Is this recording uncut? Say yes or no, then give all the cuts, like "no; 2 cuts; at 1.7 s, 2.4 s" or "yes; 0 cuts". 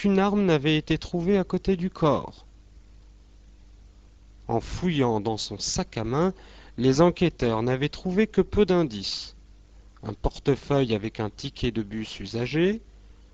yes; 0 cuts